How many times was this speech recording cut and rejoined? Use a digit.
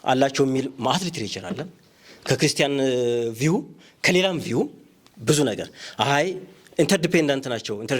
0